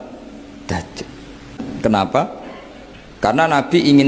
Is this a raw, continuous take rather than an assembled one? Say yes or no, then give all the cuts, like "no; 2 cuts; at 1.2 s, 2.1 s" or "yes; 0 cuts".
no; 1 cut; at 1.7 s